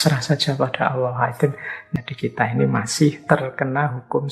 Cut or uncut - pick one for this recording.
cut